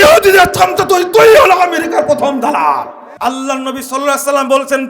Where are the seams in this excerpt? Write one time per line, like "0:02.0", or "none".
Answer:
0:03.0